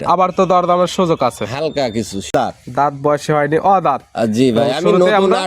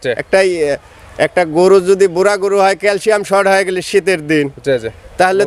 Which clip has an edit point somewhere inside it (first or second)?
first